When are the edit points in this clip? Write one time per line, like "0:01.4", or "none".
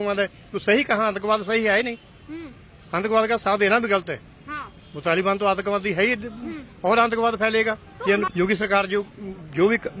0:08.3